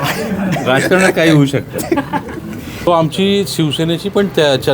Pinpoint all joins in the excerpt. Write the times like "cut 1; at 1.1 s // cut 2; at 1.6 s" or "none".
cut 1; at 2.9 s